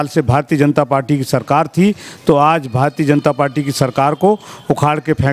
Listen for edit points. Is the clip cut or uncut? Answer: uncut